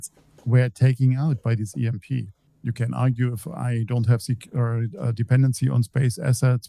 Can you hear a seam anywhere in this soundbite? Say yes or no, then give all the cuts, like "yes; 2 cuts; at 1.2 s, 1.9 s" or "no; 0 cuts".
yes; 1 cut; at 2.4 s